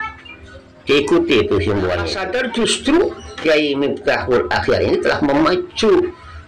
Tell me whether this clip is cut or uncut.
cut